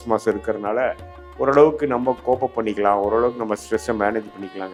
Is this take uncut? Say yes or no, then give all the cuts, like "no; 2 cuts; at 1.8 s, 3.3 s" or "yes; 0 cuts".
yes; 0 cuts